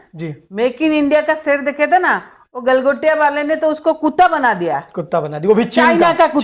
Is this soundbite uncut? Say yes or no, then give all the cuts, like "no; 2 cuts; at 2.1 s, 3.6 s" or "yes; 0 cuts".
yes; 0 cuts